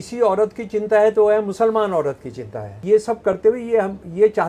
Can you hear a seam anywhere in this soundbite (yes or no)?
yes